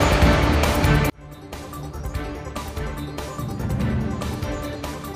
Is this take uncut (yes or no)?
no